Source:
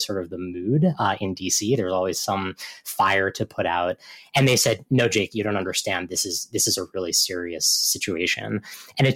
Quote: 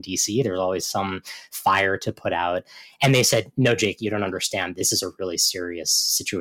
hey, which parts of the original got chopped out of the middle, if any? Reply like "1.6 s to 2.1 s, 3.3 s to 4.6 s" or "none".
6.1 s to 6.5 s